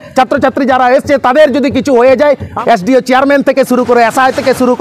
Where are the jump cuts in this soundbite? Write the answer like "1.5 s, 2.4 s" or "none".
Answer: 2.6 s